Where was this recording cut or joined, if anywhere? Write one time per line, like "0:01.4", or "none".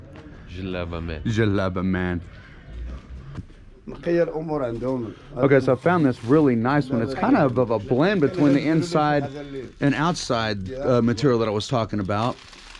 0:03.6